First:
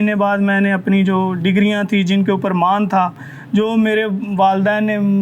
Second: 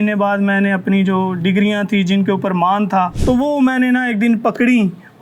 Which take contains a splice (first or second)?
second